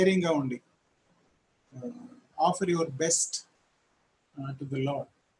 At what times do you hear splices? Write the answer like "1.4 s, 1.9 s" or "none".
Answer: none